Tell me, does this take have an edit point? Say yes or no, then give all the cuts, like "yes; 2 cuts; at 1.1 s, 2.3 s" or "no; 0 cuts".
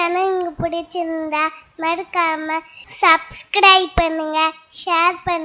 no; 0 cuts